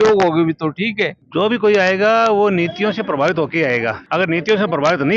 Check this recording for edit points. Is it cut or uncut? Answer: cut